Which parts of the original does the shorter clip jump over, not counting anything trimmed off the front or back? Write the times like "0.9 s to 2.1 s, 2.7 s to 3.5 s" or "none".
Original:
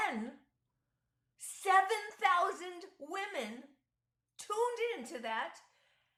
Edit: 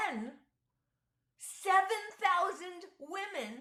none